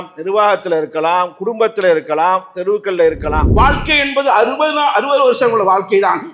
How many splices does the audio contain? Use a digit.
1